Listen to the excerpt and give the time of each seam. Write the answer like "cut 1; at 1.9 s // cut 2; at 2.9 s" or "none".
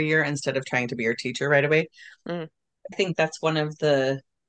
cut 1; at 2.9 s